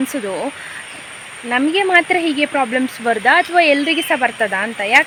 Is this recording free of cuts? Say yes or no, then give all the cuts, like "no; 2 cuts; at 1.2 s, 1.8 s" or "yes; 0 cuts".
yes; 0 cuts